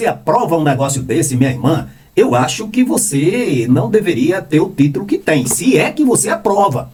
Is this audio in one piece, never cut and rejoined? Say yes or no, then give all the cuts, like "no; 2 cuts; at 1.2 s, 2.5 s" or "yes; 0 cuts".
yes; 0 cuts